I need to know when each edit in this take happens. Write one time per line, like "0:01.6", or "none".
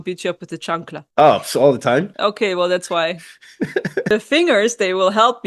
0:01.0
0:02.1
0:04.1